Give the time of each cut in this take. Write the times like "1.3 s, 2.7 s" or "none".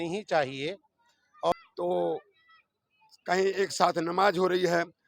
1.5 s